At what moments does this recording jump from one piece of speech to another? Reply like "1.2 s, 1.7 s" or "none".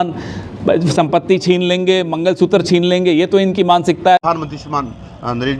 4.2 s